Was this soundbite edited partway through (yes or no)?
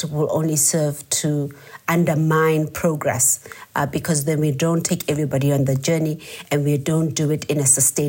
no